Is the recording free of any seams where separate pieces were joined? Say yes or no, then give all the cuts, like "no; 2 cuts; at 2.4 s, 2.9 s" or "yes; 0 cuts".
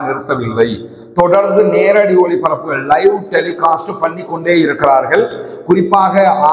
yes; 0 cuts